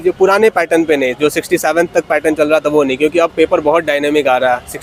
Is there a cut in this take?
no; 0 cuts

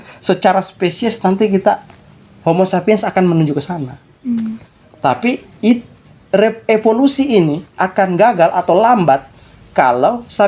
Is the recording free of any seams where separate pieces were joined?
yes; 0 cuts

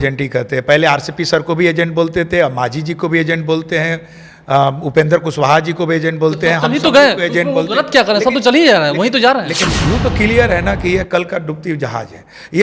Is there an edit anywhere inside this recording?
yes; 1 cut; at 9.6 s

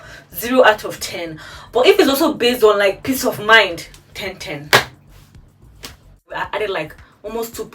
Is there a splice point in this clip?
yes; 1 cut; at 6.4 s

